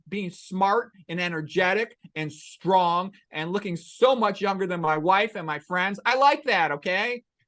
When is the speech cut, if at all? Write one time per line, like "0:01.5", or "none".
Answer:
none